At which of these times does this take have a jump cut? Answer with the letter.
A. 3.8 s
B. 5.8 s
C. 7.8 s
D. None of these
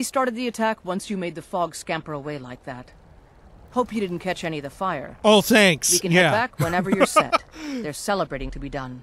D